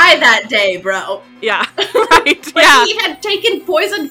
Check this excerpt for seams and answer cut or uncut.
cut